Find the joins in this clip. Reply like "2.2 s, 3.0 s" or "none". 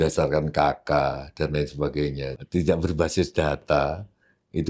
2.3 s